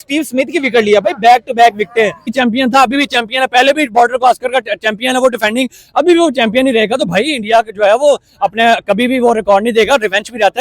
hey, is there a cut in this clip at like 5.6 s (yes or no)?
no